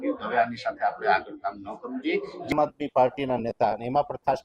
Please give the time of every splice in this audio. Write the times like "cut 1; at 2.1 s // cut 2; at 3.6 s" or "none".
cut 1; at 2.5 s